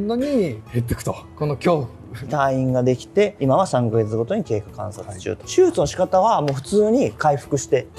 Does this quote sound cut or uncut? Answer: uncut